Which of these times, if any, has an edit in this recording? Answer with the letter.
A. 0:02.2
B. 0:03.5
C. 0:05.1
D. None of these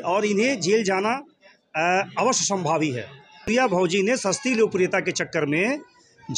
B